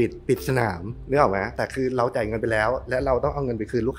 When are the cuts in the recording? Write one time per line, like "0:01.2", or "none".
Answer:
0:00.9
0:01.5